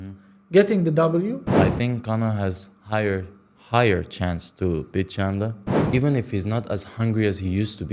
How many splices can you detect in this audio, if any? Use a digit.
2